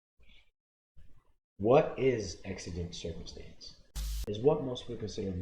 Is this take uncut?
no; 1 cut; at 4.0 s

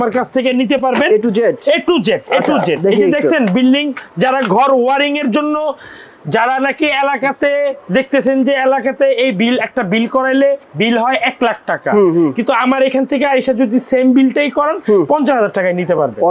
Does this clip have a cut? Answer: no; 0 cuts

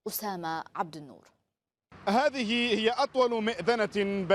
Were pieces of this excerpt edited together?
no; 0 cuts

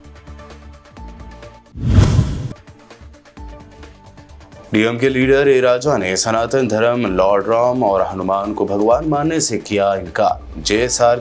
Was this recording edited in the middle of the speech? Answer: no; 0 cuts

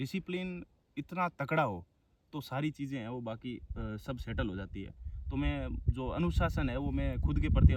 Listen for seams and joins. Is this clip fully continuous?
yes; 0 cuts

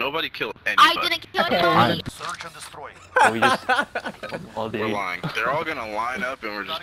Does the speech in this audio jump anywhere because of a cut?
no; 0 cuts

